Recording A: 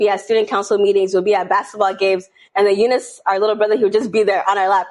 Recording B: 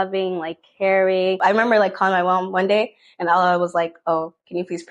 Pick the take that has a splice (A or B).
B